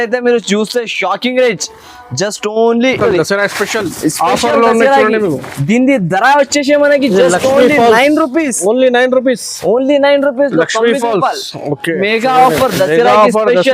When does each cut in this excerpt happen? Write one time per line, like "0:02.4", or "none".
0:03.0
0:11.8